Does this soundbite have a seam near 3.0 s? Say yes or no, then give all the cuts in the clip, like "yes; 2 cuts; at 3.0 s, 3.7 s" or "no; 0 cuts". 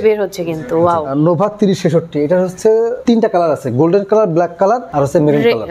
yes; 3 cuts; at 1.1 s, 3.0 s, 4.9 s